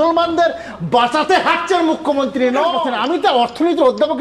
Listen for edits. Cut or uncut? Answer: cut